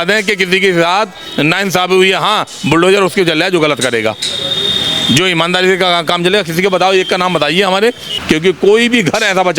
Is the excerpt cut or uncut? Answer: cut